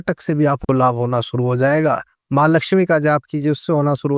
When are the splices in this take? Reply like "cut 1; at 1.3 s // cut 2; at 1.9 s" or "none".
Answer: none